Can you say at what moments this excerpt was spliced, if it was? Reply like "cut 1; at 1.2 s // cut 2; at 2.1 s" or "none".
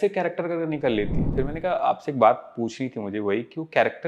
cut 1; at 1.3 s